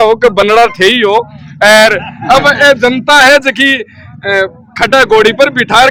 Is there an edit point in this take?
no; 0 cuts

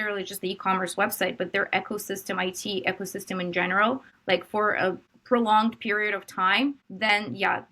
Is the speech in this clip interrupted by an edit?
yes; 3 cuts; at 4.1 s, 5.1 s, 6.9 s

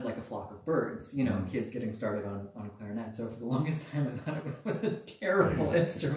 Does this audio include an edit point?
yes; 1 cut; at 3.1 s

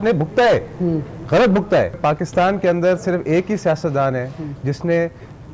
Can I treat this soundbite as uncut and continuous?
no; 1 cut; at 1.9 s

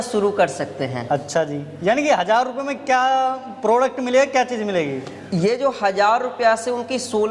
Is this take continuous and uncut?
yes; 0 cuts

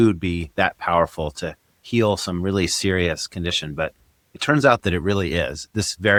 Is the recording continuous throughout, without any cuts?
yes; 0 cuts

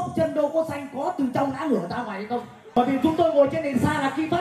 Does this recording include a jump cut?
yes; 1 cut; at 2.8 s

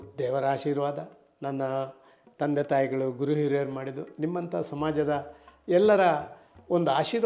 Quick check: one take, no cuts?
yes; 0 cuts

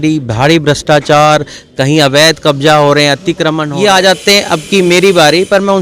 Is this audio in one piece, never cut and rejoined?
no; 1 cut; at 3.6 s

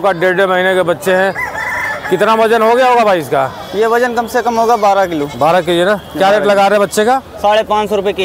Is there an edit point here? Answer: no; 0 cuts

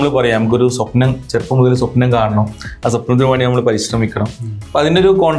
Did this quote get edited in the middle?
no; 0 cuts

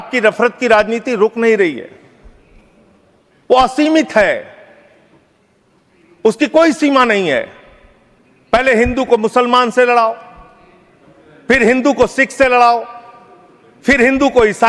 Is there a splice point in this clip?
no; 0 cuts

